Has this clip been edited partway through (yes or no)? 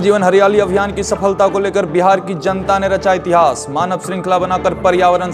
no